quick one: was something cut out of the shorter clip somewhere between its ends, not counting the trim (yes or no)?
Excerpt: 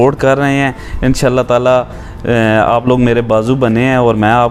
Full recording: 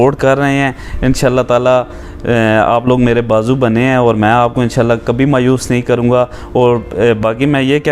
no